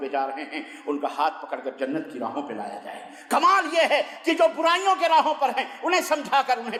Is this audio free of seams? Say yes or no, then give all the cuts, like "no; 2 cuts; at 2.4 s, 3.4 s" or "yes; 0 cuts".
yes; 0 cuts